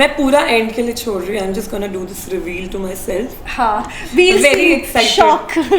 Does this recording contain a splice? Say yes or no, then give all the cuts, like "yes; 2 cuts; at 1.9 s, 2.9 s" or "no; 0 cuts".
no; 0 cuts